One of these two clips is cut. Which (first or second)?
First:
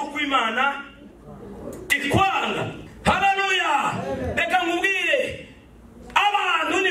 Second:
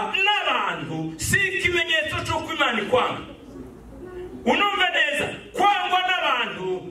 first